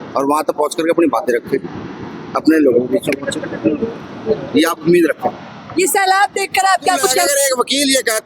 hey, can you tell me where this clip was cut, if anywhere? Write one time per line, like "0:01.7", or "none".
0:07.3